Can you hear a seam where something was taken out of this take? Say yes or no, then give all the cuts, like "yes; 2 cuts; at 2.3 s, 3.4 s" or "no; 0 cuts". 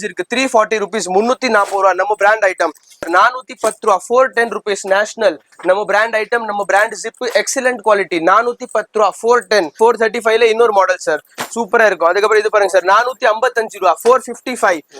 yes; 2 cuts; at 3.0 s, 9.7 s